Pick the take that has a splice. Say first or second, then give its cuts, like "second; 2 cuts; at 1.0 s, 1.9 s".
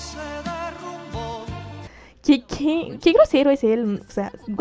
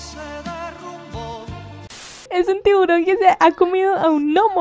second; 1 cut; at 2.3 s